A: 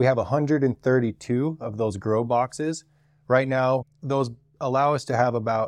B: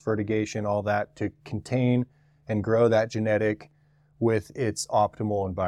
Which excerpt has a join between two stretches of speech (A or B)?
A